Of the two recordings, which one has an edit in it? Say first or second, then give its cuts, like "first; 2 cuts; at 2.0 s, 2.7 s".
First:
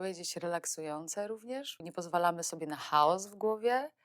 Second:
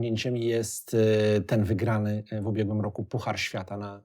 first; 1 cut; at 1.8 s